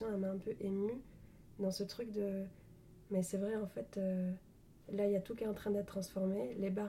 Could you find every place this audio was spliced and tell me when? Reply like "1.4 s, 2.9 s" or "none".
none